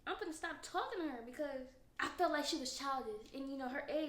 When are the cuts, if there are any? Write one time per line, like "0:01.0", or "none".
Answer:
0:01.8

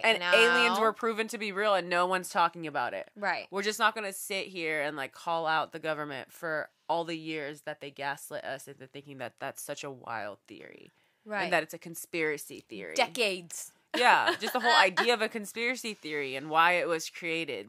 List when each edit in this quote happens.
none

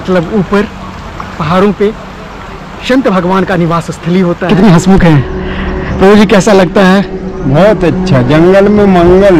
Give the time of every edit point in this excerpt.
0:04.5

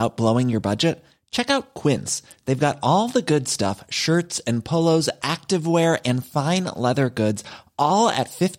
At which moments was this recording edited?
none

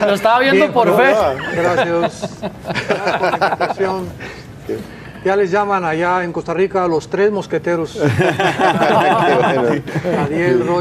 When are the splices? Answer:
0:02.8

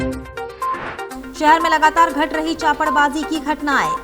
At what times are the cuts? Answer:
0:01.2

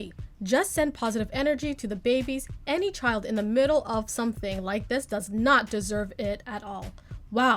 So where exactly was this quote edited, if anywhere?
none

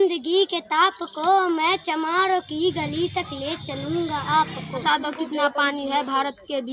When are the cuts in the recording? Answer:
0:04.8

